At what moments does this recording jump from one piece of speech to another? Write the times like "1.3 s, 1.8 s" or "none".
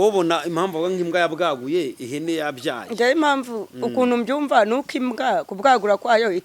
none